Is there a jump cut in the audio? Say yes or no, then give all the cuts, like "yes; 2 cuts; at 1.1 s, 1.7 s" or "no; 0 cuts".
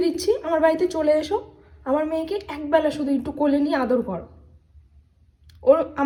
no; 0 cuts